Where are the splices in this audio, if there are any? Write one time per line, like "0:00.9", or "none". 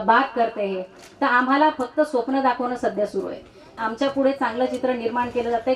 0:03.8